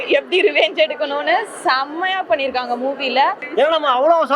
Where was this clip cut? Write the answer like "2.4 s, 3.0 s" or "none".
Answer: 3.4 s

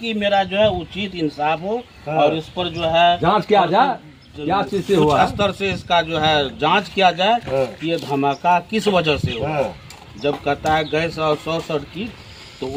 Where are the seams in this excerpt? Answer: none

